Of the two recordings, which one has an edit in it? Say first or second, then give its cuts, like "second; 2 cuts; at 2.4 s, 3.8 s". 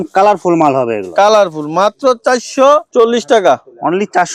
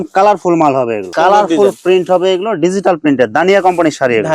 second; 1 cut; at 1.1 s